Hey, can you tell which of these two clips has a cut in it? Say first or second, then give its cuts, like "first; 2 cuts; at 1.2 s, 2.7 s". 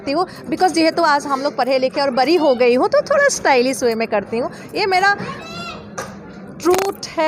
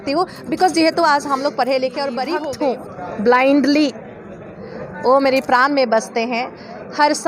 second; 1 cut; at 2.2 s